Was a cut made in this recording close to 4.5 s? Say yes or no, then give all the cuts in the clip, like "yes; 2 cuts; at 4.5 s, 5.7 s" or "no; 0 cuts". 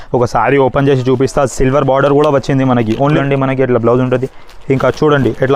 no; 1 cut; at 3.2 s